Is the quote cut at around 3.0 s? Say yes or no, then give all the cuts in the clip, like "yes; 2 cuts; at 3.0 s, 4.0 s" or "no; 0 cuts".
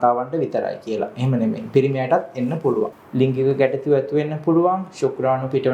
yes; 1 cut; at 3.0 s